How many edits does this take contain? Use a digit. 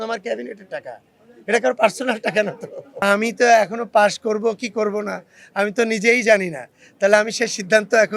1